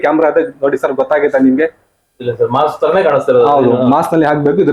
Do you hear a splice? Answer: no; 0 cuts

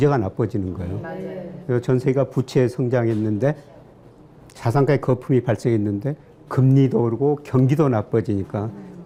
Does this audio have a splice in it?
no; 0 cuts

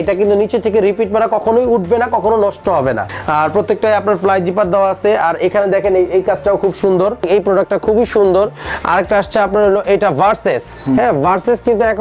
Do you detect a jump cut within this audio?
yes; 2 cuts; at 3.1 s, 7.3 s

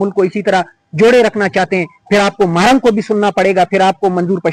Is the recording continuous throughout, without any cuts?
yes; 0 cuts

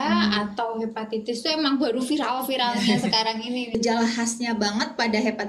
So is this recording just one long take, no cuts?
no; 1 cut; at 3.7 s

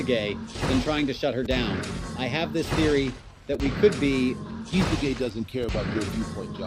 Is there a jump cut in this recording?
no; 0 cuts

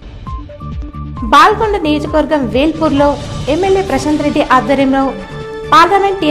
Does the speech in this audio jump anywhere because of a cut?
yes; 1 cut; at 0.9 s

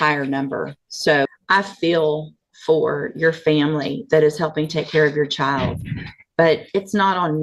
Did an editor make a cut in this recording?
yes; 1 cut; at 1.2 s

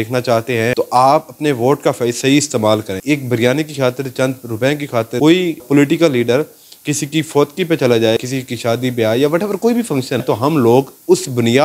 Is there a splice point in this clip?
yes; 4 cuts; at 0.7 s, 3.0 s, 8.3 s, 10.2 s

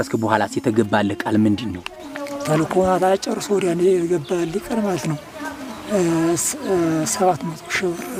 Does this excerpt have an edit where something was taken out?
no; 0 cuts

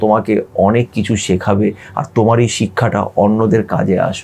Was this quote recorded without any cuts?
yes; 0 cuts

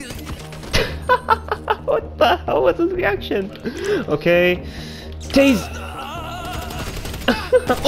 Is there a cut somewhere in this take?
no; 0 cuts

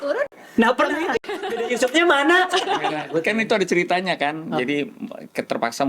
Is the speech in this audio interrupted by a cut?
yes; 2 cuts; at 1.4 s, 3.0 s

